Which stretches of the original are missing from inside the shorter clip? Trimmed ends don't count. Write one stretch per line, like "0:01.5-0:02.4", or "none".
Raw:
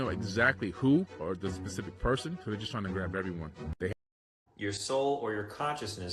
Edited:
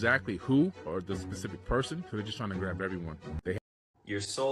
0:03.8-0:03.9